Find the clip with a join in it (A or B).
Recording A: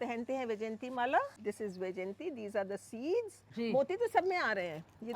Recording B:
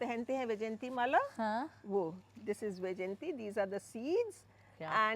A